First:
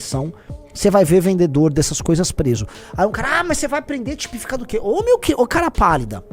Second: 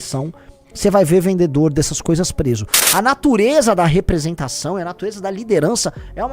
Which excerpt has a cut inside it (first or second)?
second